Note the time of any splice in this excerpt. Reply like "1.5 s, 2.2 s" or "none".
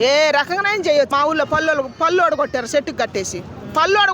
1.1 s

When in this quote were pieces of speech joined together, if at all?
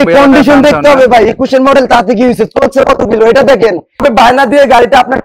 4.0 s

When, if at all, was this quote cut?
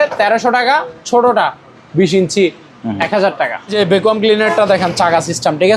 3.7 s

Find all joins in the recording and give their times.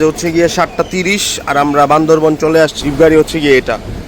2.8 s

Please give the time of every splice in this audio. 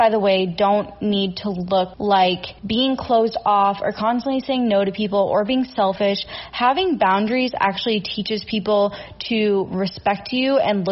1.9 s, 2.5 s

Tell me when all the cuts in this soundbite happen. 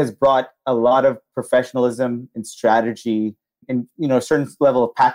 3.6 s

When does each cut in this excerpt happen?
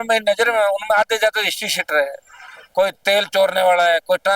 none

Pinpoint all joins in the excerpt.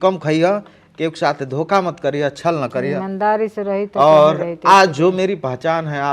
none

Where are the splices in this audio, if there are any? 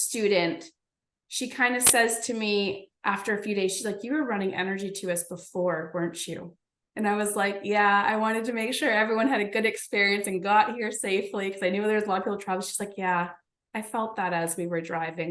none

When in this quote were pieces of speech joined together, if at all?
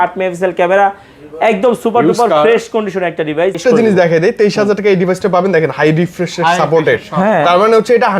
3.6 s

